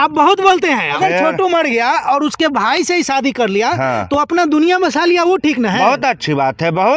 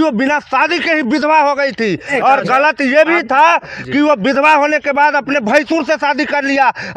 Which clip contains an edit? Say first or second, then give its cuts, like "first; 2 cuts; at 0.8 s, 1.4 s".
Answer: first; 1 cut; at 1.0 s